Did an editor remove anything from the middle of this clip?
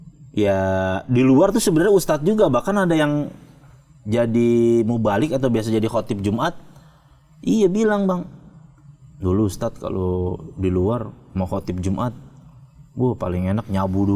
no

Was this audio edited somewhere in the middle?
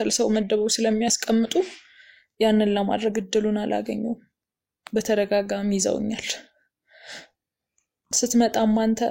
no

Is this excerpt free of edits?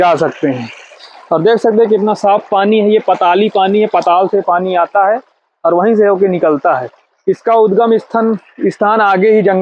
yes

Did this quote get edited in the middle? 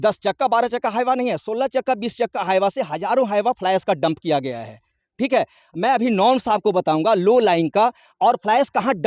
no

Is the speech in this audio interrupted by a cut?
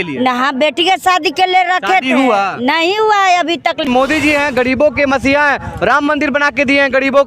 yes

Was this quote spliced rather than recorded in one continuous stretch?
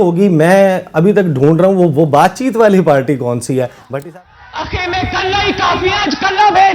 yes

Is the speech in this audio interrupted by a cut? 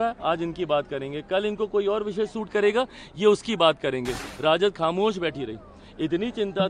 yes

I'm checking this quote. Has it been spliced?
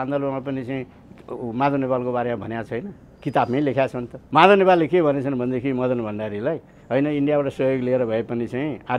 yes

